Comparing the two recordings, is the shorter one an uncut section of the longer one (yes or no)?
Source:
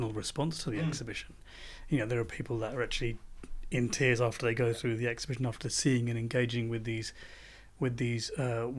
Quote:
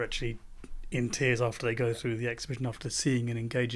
yes